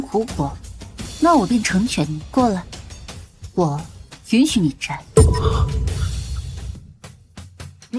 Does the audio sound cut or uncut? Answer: cut